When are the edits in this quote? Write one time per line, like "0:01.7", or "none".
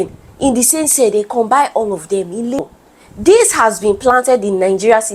0:02.6